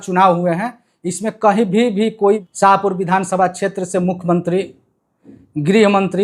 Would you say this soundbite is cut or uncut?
cut